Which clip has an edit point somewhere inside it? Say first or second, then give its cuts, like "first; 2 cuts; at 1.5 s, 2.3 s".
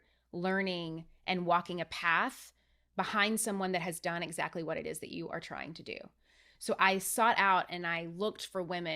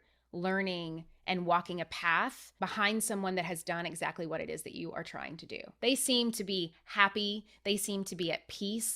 second; 2 cuts; at 2.4 s, 5.6 s